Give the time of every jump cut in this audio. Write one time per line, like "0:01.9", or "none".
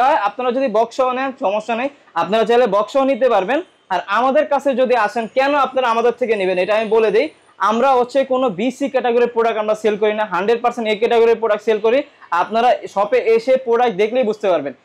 none